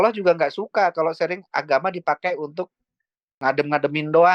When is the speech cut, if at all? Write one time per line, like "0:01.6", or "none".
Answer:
0:03.4